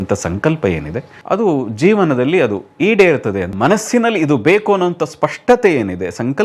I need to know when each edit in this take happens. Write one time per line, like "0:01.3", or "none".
0:01.1
0:03.5